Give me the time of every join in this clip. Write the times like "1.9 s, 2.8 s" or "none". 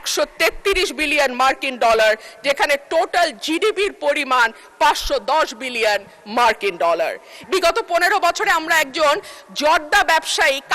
7.4 s

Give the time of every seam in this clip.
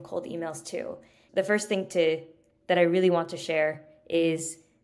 1.2 s

